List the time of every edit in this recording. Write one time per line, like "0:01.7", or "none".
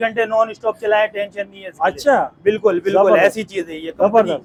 none